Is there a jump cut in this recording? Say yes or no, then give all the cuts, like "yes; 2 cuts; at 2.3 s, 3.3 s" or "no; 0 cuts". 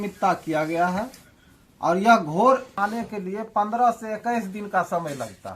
yes; 1 cut; at 2.7 s